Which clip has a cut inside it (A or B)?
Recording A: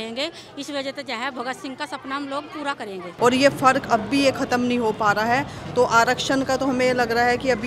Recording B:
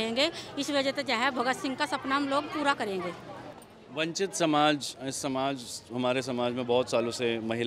A